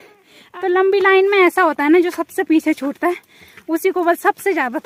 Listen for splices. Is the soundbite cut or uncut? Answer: uncut